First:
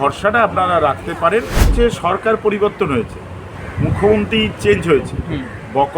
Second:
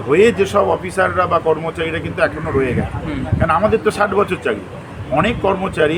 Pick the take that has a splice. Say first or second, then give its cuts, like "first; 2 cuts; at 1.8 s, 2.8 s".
first; 1 cut; at 1.7 s